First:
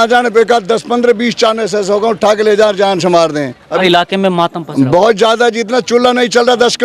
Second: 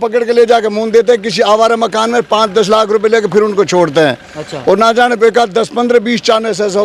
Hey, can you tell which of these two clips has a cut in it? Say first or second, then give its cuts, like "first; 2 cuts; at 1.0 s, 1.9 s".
first; 1 cut; at 3.7 s